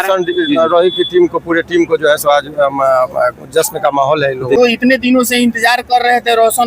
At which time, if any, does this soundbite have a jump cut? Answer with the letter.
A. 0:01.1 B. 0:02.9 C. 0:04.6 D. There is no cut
C